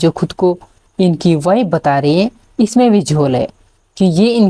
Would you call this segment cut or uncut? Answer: uncut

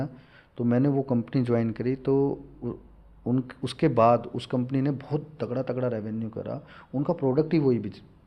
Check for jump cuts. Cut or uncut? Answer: uncut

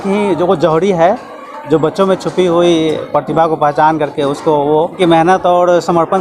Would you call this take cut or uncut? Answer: cut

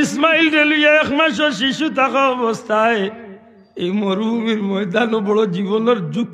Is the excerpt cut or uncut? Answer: uncut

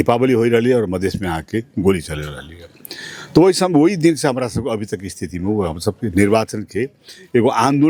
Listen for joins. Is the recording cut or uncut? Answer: uncut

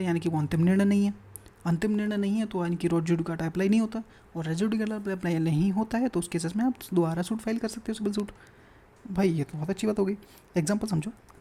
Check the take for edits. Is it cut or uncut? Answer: uncut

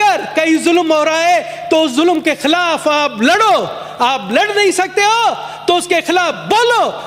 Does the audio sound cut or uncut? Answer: uncut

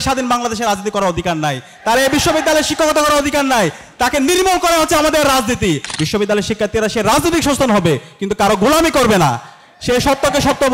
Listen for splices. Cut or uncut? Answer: cut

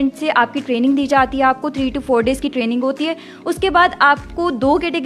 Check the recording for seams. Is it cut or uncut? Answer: uncut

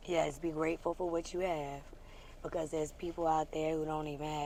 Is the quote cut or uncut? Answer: uncut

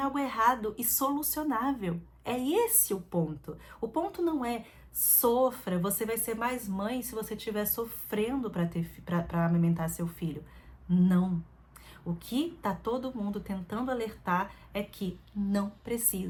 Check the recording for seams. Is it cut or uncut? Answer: uncut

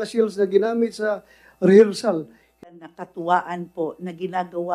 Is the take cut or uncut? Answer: cut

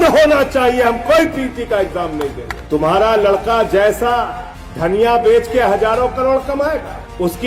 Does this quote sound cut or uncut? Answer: cut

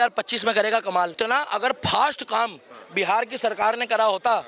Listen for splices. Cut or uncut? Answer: cut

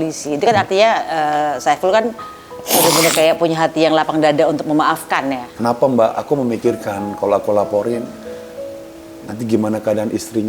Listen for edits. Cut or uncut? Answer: cut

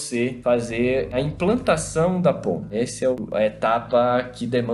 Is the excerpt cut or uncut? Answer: cut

